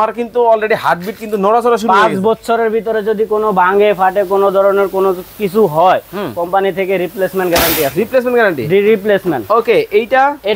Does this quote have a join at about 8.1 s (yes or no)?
no